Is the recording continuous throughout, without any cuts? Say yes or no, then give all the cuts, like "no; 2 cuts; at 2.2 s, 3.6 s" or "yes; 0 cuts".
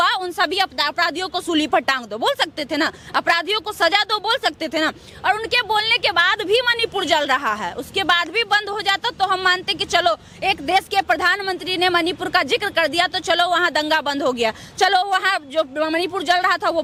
yes; 0 cuts